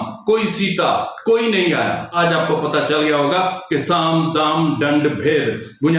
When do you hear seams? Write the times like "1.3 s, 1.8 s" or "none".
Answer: 2.1 s

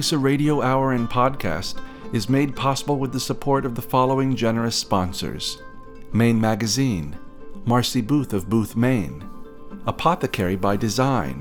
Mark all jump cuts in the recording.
none

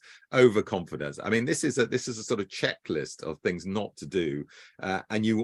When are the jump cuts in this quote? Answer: none

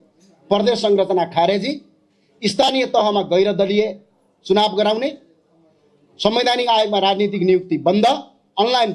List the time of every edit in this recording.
none

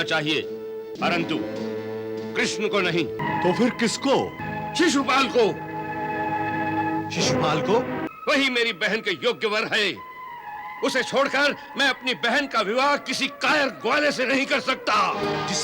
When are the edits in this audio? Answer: 0.9 s, 3.2 s, 4.4 s, 8.1 s

